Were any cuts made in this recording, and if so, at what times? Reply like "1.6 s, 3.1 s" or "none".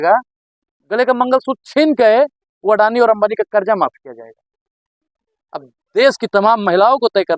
none

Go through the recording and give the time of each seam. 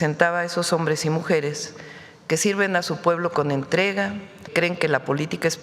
4.5 s

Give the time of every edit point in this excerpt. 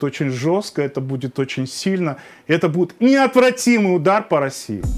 none

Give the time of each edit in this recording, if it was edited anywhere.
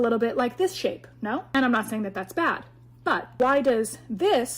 1.5 s, 2.9 s

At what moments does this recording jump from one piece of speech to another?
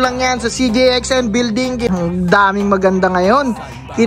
1.9 s

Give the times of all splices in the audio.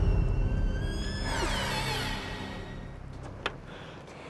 2.7 s

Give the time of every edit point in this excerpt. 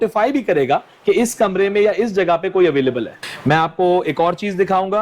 3.2 s

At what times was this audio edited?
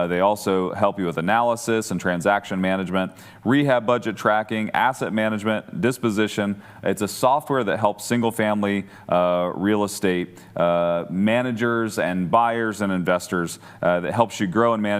none

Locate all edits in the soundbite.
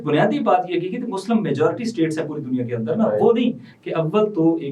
3.7 s

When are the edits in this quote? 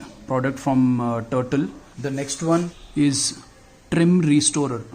1.9 s, 2.8 s

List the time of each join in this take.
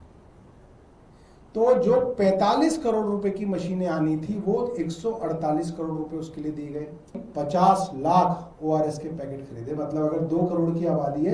7.2 s

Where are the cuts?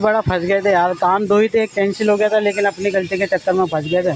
none

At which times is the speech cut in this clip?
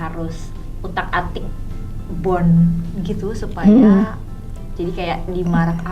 none

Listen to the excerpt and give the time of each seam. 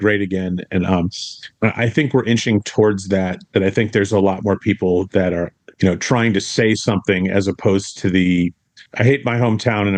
none

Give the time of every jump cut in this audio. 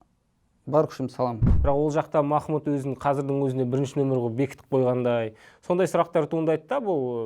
1.5 s

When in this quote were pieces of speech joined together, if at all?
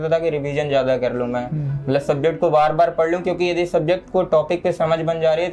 none

